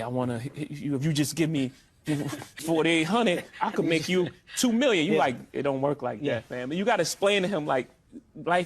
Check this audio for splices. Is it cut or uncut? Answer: cut